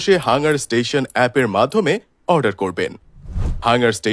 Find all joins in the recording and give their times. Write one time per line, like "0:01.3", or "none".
0:03.1